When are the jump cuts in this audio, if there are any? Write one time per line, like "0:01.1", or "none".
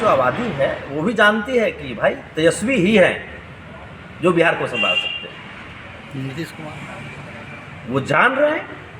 0:06.5